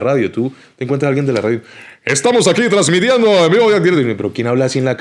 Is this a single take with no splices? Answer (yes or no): yes